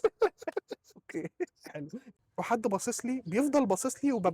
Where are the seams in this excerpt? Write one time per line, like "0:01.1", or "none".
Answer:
0:02.3